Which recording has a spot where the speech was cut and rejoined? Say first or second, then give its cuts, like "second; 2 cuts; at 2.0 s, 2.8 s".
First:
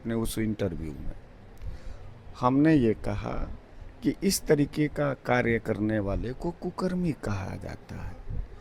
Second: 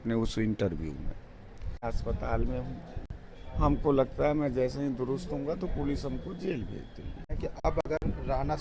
second; 2 cuts; at 1.8 s, 7.3 s